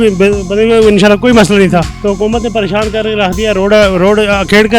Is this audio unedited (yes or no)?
no